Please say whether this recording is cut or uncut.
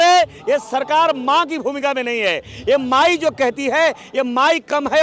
uncut